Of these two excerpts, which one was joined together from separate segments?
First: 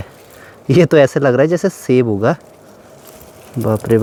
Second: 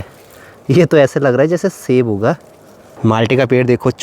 second; 1 cut; at 2.9 s

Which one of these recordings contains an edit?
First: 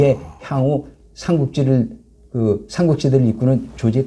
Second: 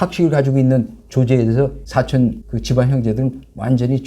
second; 2 cuts; at 1.8 s, 2.5 s

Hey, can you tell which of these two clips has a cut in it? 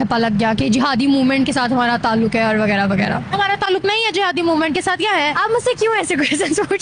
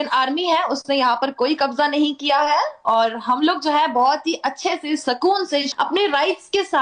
second; 1 cut; at 5.7 s

